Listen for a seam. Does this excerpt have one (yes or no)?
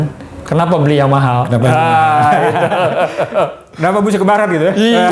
no